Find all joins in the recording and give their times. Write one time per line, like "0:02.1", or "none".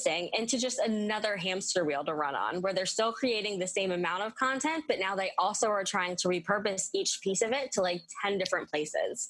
none